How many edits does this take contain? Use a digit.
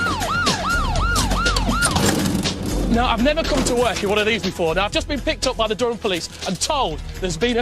1